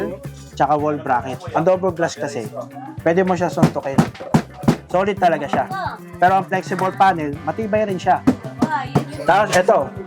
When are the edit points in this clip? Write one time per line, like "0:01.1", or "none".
0:01.4
0:04.8
0:06.0
0:09.1

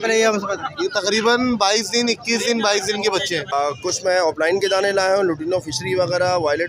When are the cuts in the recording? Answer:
0:03.5

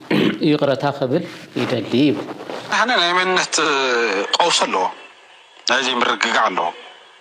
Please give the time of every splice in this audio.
0:02.7

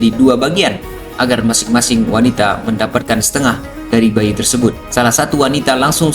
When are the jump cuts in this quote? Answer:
0:04.8

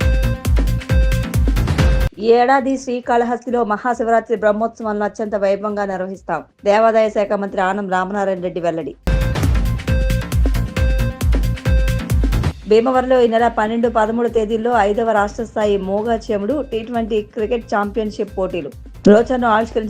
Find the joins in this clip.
0:01.7

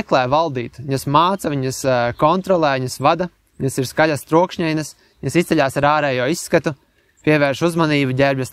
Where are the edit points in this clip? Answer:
none

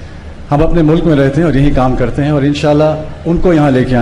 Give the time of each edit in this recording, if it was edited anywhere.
none

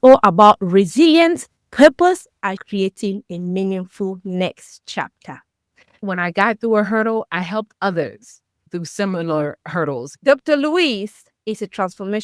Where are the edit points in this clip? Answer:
0:05.9
0:10.1

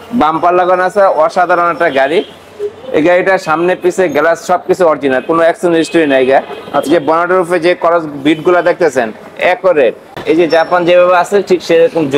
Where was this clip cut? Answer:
0:10.1

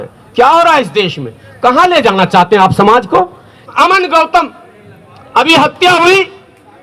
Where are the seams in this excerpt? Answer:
0:03.7

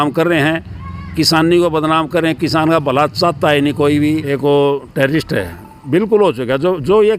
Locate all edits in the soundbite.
0:04.2

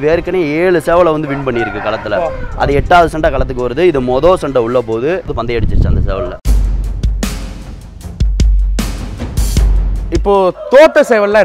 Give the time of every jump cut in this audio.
0:05.3
0:06.4
0:10.1

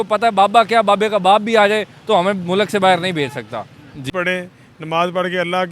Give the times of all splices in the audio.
0:04.1

